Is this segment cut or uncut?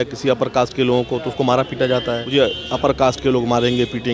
cut